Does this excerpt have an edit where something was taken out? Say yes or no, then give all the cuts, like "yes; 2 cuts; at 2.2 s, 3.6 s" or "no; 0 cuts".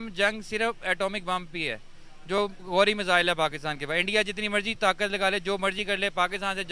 no; 0 cuts